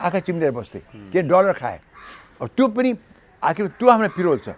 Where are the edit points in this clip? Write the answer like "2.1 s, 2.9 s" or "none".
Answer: none